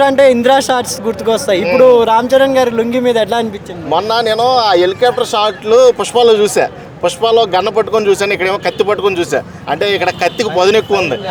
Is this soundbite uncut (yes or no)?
yes